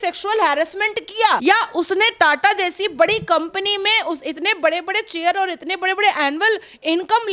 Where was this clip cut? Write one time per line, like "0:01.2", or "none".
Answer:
none